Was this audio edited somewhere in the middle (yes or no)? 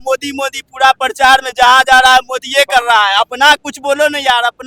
no